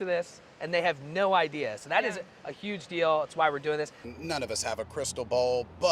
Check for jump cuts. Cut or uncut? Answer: cut